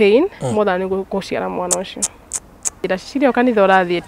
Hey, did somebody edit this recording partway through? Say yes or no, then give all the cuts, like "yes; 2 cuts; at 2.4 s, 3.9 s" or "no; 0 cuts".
yes; 1 cut; at 2.8 s